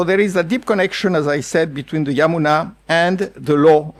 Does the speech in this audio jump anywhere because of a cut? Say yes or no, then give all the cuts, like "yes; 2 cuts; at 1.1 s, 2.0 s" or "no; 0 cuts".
no; 0 cuts